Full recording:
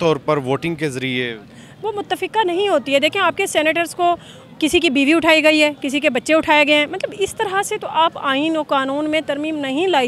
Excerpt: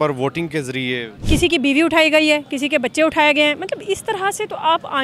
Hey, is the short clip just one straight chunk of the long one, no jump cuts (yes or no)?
no